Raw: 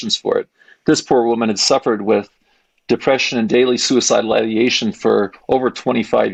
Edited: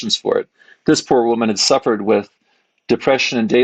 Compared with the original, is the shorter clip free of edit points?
yes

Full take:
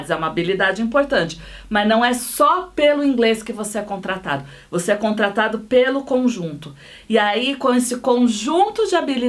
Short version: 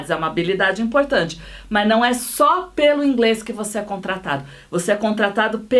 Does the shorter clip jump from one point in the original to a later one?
no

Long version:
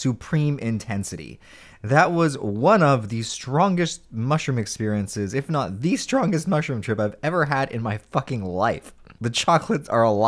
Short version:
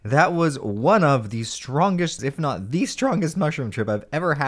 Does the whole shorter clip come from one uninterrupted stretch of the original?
no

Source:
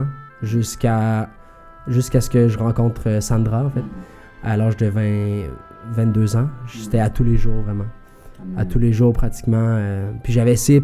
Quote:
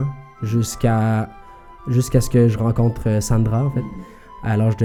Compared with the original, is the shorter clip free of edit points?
yes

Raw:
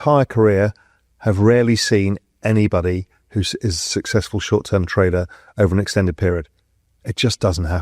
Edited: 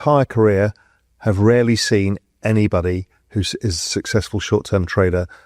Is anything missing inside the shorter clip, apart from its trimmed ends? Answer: no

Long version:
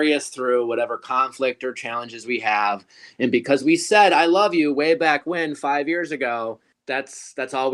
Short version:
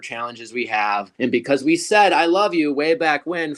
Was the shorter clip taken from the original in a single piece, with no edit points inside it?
no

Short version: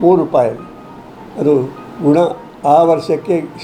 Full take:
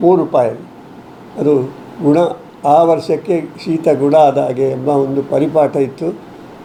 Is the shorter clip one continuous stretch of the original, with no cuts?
yes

